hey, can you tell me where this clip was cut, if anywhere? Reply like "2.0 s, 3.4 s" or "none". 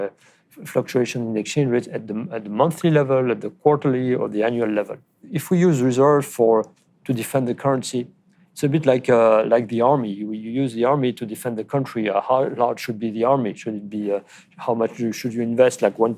5.3 s